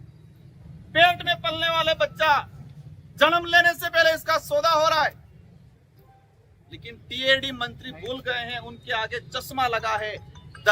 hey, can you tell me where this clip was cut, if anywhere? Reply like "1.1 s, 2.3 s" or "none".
none